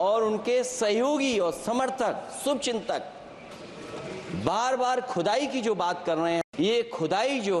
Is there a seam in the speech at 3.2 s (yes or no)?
no